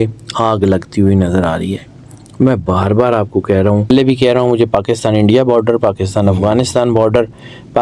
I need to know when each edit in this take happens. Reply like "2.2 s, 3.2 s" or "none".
3.9 s